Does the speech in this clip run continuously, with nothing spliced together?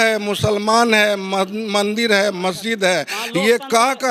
yes; 0 cuts

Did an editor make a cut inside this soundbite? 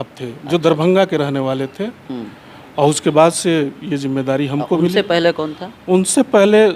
no; 0 cuts

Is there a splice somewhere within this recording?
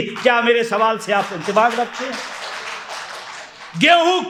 no; 0 cuts

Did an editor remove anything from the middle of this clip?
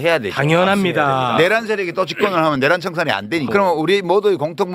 yes; 1 cut; at 3.5 s

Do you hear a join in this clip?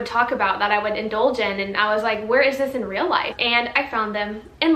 yes; 1 cut; at 3.3 s

